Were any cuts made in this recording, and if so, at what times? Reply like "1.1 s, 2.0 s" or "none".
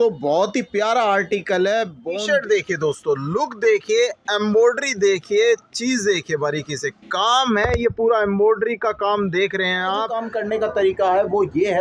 2.0 s, 10.2 s